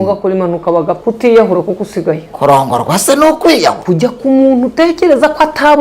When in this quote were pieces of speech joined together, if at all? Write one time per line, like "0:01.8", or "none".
0:00.9
0:02.0
0:03.8